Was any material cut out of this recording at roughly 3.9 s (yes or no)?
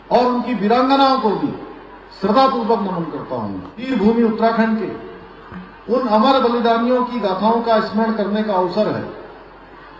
yes